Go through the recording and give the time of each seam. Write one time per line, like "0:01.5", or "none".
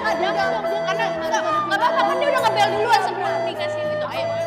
none